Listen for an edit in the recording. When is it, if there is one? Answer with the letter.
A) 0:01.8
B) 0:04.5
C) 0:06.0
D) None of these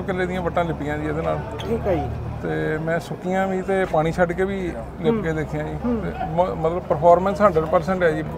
D